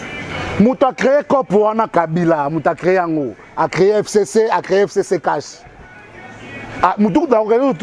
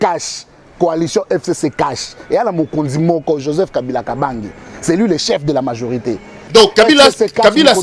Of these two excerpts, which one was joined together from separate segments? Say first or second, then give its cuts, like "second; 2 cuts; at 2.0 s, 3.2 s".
second; 1 cut; at 6.5 s